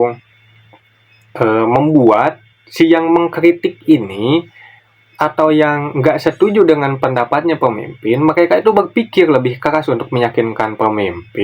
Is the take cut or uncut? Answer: uncut